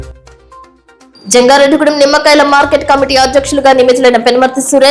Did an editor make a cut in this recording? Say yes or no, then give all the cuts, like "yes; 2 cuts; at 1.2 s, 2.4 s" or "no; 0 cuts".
yes; 1 cut; at 1.0 s